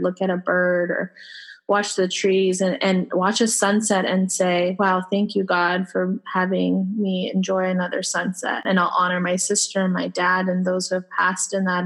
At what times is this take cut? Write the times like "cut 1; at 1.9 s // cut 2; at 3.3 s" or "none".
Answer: cut 1; at 8.6 s